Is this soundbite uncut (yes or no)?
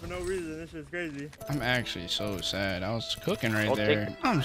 no